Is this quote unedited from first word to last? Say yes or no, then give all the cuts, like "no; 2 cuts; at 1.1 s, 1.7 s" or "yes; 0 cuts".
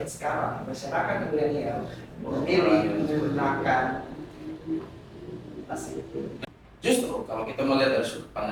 no; 1 cut; at 6.4 s